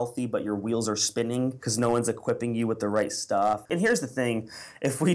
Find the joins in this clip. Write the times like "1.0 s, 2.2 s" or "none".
1.6 s, 3.6 s